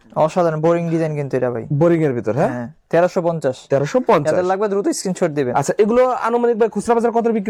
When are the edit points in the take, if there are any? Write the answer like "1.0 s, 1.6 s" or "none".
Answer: none